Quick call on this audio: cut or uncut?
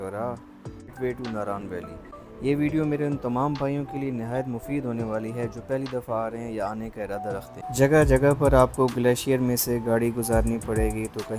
cut